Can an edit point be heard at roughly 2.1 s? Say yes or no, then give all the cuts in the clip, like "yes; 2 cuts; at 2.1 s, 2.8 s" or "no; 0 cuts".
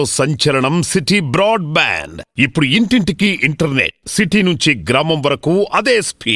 no; 0 cuts